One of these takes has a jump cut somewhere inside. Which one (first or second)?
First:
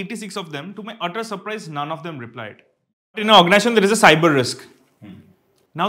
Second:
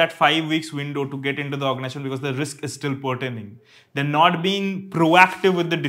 first